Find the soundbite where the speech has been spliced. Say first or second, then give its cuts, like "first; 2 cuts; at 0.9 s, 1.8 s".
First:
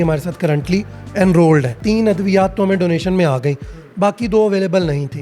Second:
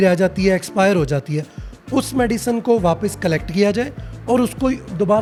first; 1 cut; at 1.7 s